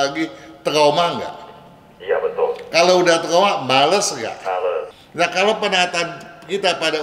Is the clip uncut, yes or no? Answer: no